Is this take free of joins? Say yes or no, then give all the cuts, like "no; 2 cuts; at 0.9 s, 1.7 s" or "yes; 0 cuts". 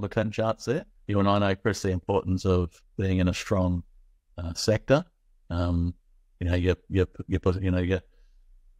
no; 1 cut; at 0.9 s